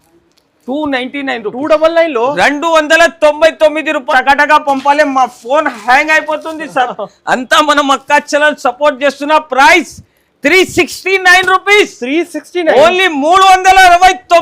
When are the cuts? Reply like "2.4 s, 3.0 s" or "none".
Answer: 4.0 s